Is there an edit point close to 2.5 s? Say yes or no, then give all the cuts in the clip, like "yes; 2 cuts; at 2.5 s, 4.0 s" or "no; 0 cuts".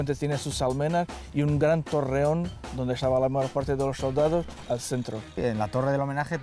no; 1 cut; at 5.4 s